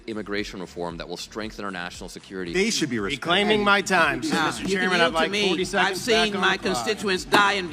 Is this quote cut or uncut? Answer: uncut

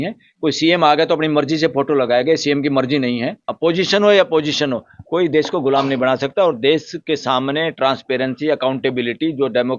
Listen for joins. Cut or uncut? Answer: cut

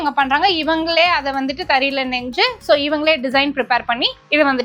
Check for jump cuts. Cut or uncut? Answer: uncut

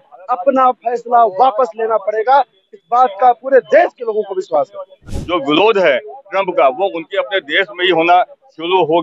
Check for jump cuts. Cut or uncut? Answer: cut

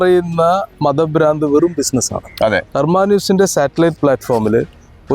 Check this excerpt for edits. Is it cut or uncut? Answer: cut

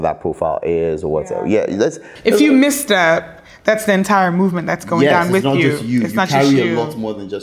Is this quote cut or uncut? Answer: uncut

